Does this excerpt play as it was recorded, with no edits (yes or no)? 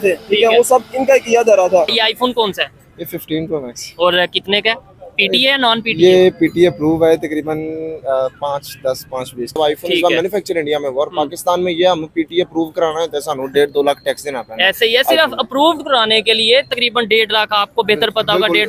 no